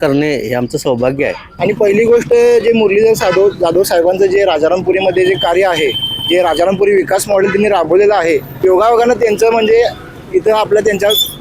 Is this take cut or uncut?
cut